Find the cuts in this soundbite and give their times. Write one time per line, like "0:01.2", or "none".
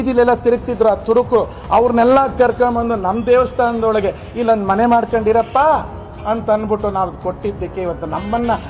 none